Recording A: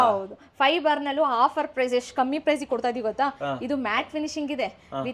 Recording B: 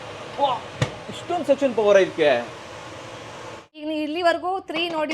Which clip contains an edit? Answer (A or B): B